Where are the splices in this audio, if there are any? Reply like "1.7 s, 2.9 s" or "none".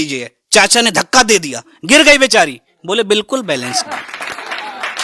none